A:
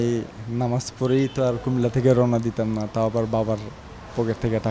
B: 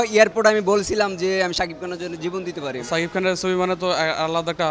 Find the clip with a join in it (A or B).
B